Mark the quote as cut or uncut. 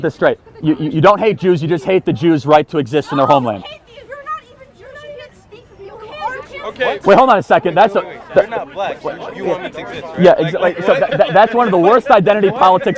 uncut